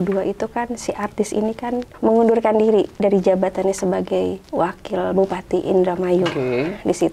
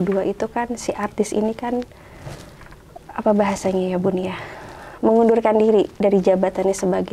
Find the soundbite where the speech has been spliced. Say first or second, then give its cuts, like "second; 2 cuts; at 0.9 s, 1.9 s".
first; 2 cuts; at 1.9 s, 4.4 s